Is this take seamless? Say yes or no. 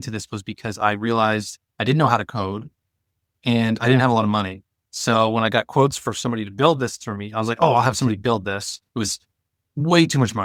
yes